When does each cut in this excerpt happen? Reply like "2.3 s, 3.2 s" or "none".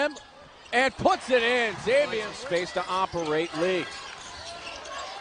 none